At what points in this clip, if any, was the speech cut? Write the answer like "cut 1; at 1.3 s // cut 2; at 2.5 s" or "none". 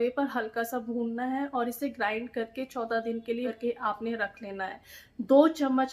none